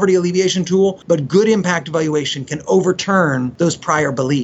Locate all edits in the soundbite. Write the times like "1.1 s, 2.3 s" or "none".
1.0 s, 3.5 s